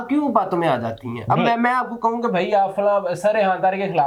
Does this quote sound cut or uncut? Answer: uncut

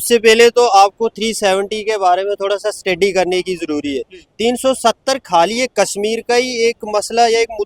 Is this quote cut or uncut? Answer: uncut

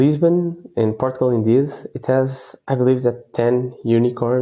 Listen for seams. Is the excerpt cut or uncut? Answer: uncut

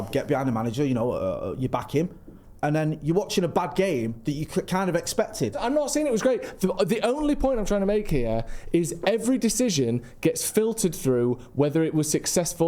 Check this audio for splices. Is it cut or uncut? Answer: cut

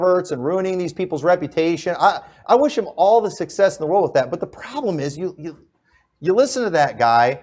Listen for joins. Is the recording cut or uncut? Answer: cut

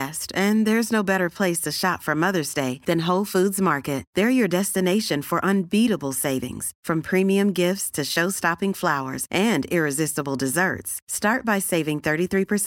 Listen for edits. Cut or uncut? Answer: uncut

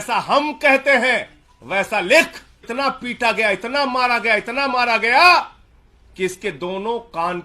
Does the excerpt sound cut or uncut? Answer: cut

